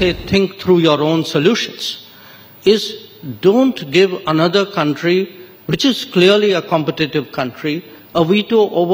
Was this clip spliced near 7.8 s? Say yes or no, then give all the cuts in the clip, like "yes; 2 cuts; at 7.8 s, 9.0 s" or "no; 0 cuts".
no; 0 cuts